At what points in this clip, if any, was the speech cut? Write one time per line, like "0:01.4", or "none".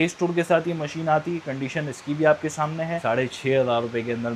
0:03.0